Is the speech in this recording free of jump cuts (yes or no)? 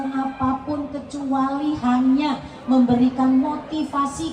yes